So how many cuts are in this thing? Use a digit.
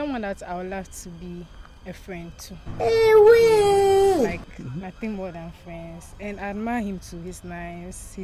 0